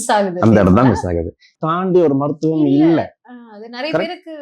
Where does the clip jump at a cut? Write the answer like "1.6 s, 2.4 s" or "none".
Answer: 1.5 s